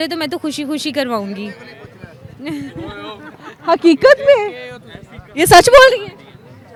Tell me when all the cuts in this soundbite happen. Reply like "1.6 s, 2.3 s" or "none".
none